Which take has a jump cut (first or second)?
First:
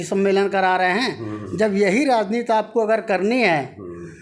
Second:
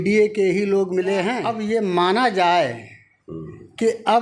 second